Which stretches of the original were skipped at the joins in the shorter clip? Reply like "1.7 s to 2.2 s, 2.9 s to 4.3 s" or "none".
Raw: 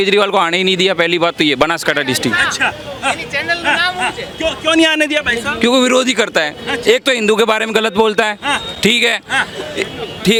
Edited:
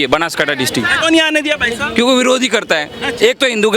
2.4 s to 4.6 s